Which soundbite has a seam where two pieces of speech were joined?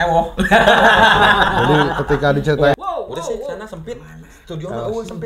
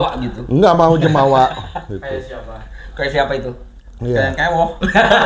first; 1 cut; at 2.8 s

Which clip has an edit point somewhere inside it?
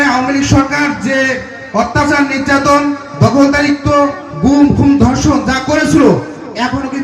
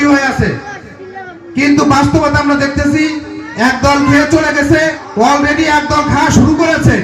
second; 1 cut; at 5.0 s

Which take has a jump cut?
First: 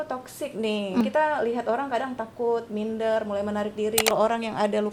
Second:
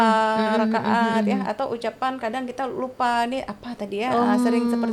first; 2 cuts; at 1.0 s, 4.1 s

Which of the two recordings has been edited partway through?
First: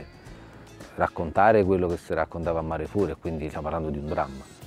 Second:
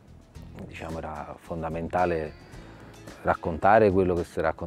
first; 1 cut; at 3.5 s

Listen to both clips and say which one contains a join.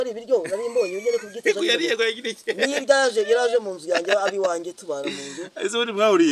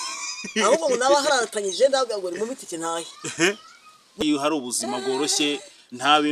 second; 1 cut; at 4.2 s

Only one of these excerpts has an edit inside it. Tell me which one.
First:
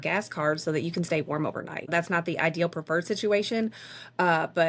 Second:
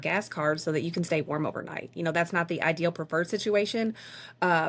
first; 1 cut; at 1.9 s

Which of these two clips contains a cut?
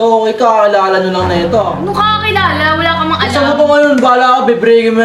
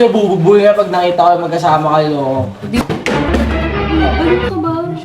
second; 1 cut; at 2.8 s

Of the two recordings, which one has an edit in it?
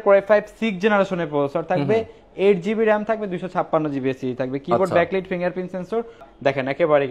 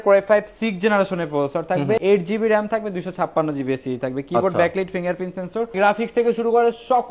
second; 2 cuts; at 2.0 s, 5.8 s

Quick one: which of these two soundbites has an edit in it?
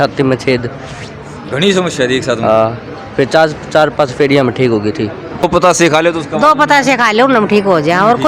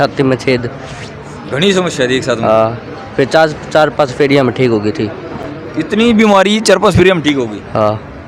first; 1 cut; at 5.4 s

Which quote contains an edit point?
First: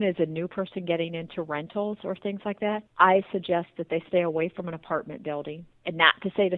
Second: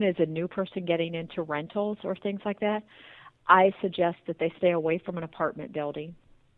first; 2 cuts; at 2.9 s, 5.7 s

